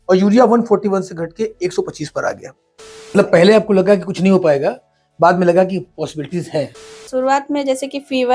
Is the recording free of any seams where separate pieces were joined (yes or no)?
no